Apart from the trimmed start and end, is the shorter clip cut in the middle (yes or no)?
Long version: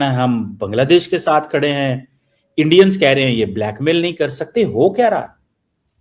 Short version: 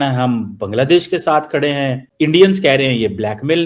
yes